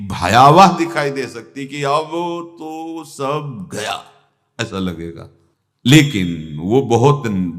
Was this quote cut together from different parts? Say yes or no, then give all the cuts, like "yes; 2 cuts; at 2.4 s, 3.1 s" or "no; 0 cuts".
no; 0 cuts